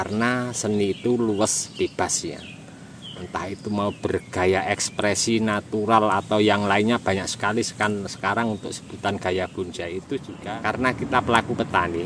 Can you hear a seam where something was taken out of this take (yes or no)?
yes